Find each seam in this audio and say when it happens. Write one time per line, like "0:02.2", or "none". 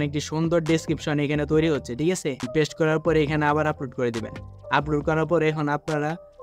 0:02.4